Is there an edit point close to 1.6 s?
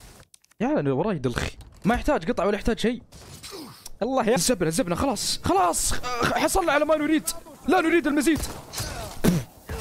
yes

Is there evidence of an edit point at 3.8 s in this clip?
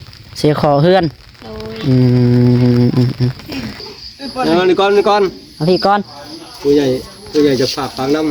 yes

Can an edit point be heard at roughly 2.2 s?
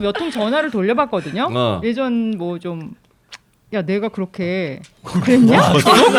no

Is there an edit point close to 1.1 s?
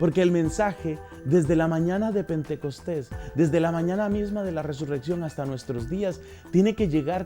no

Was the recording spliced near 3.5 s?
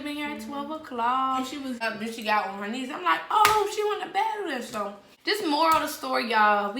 no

